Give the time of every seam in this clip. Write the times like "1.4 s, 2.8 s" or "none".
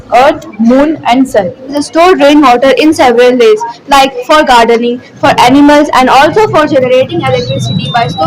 1.7 s